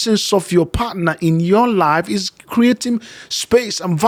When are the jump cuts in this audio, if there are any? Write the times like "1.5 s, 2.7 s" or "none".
none